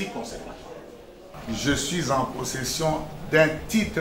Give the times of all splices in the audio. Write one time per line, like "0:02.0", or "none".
0:01.2